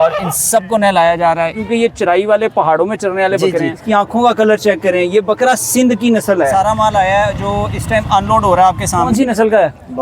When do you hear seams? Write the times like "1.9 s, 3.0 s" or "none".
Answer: 1.6 s, 3.8 s, 6.5 s, 9.1 s